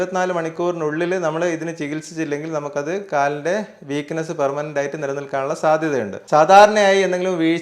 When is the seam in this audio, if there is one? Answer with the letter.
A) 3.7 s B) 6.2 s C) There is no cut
B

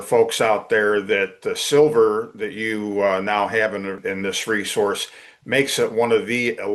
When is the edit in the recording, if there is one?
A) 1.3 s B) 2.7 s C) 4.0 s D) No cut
C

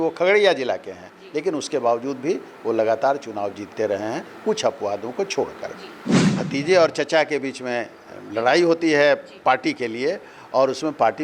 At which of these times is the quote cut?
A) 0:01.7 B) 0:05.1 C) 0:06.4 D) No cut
C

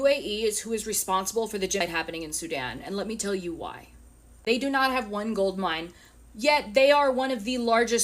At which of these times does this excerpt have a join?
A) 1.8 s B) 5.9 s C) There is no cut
A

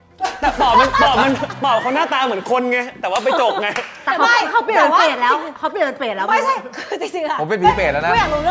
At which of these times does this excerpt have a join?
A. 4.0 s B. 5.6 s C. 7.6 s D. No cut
D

